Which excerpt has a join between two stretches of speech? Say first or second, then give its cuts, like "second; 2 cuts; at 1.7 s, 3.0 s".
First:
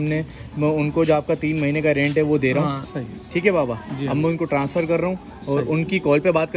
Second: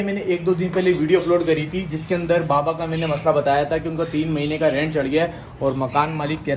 first; 1 cut; at 2.9 s